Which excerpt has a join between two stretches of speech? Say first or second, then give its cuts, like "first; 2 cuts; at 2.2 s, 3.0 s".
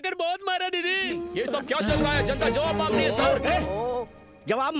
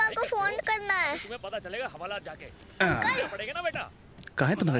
first; 1 cut; at 1.3 s